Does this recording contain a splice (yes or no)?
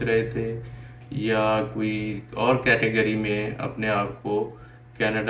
no